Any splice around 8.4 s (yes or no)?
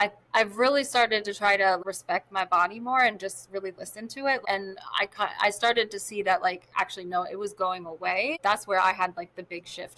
yes